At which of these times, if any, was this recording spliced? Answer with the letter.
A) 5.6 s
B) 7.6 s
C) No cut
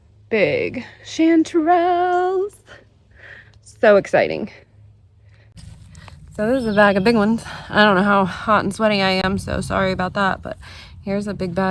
A